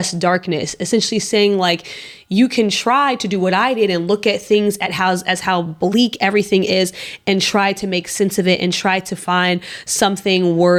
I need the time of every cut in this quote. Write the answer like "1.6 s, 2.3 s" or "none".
none